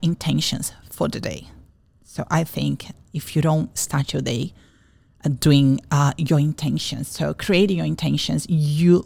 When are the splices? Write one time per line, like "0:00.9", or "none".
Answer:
none